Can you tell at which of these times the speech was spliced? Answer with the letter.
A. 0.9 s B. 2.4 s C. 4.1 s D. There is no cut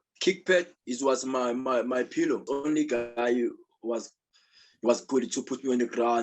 B